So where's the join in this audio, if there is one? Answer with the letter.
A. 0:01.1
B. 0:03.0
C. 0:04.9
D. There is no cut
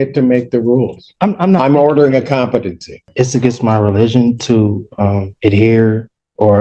B